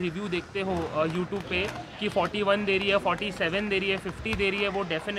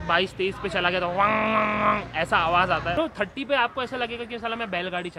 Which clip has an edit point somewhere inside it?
second; 1 cut; at 3.0 s

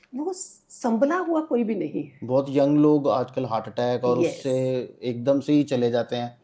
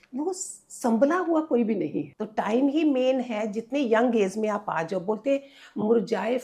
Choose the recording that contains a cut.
second; 1 cut; at 2.1 s

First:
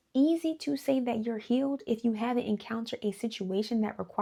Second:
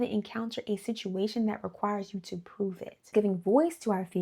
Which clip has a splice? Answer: second; 1 cut; at 3.1 s

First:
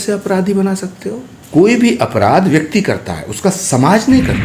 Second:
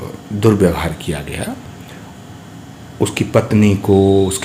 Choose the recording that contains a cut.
first; 1 cut; at 1.3 s

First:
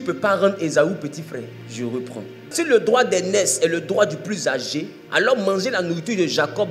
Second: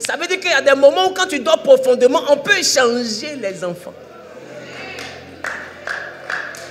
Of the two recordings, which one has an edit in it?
first; 3 cuts; at 1.6 s, 2.5 s, 5.0 s

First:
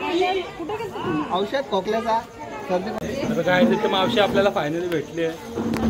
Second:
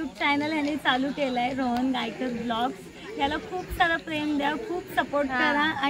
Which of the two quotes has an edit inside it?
first; 1 cut; at 2.9 s

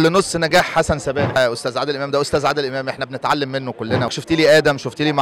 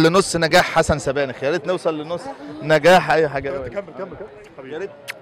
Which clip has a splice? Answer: first; 2 cuts; at 1.3 s, 4.1 s

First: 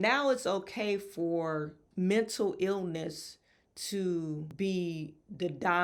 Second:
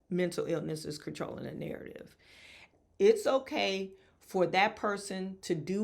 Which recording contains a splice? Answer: second; 1 cut; at 2.7 s

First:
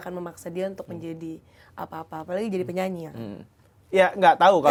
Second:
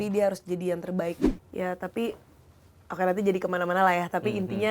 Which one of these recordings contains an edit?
second; 1 cut; at 1.3 s

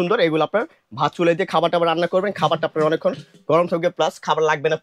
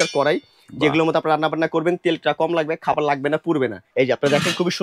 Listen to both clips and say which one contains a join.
second; 1 cut; at 3.8 s

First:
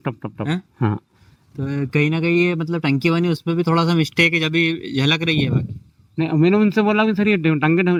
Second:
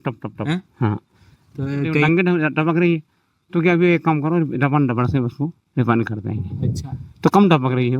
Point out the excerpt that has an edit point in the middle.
second; 1 cut; at 2.1 s

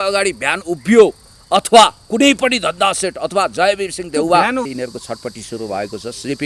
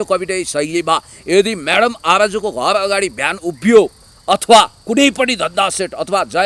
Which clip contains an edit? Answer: first; 1 cut; at 4.7 s

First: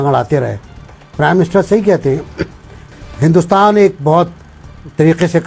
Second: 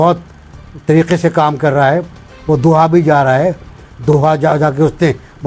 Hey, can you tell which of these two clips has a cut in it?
first; 1 cut; at 3.0 s

